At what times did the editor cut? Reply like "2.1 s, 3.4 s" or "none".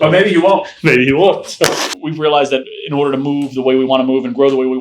1.9 s